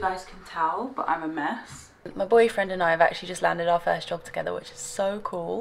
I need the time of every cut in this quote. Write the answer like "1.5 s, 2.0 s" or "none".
2.1 s